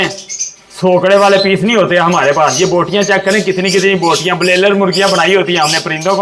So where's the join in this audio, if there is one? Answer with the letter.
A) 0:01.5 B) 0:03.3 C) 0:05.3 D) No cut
D